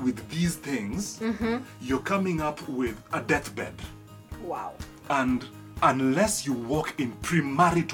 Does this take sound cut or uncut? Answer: uncut